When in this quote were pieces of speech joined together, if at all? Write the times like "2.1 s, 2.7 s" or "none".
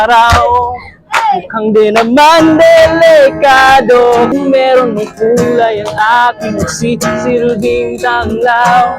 4.3 s

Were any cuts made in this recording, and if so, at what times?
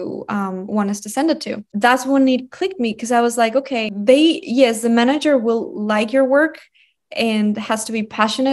1.7 s, 3.9 s

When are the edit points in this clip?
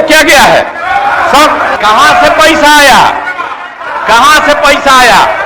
1.7 s

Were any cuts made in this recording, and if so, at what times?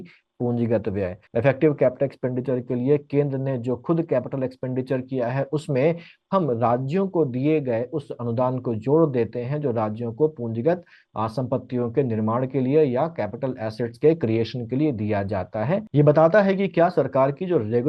1.2 s, 15.8 s

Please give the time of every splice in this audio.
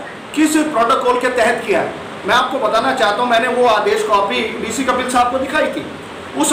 none

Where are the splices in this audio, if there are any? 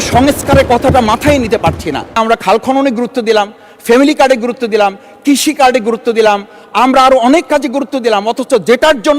2.2 s

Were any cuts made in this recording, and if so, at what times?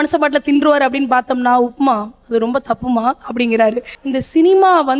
3.9 s

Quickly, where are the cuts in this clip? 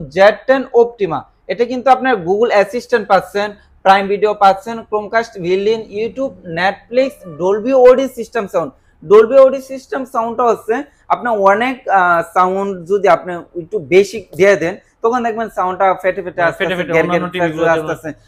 none

